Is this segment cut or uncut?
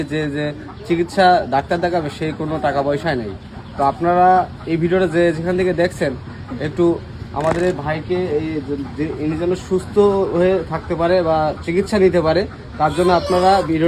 uncut